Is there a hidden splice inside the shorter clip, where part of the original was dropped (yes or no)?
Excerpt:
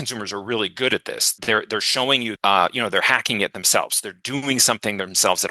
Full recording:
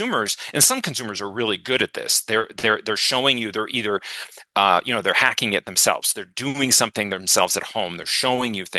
yes